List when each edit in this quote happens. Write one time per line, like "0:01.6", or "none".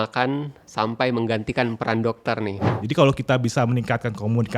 0:02.8